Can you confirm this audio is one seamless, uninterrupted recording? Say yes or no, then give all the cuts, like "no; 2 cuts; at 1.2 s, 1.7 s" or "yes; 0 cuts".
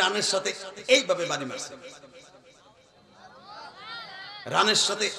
yes; 0 cuts